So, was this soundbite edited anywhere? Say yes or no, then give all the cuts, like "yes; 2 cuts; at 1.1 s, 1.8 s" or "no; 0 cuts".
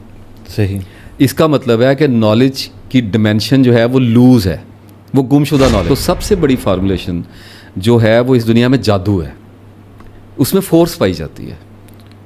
yes; 1 cut; at 5.8 s